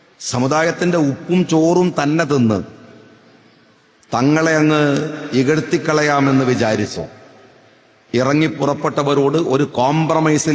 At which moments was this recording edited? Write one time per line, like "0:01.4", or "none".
none